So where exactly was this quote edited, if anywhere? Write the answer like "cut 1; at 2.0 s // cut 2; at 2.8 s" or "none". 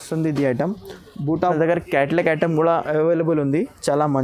cut 1; at 1.4 s // cut 2; at 2.9 s